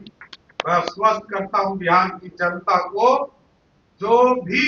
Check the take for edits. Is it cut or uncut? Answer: uncut